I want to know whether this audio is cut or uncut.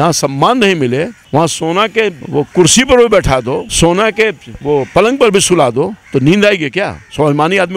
cut